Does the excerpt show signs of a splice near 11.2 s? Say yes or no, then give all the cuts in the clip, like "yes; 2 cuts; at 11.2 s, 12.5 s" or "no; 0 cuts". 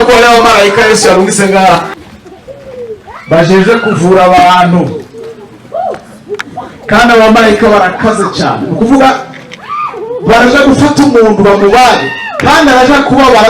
no; 1 cut; at 1.9 s